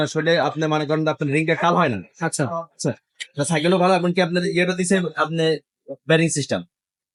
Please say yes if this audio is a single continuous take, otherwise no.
yes